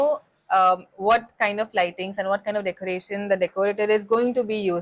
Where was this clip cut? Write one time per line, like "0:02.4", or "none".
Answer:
none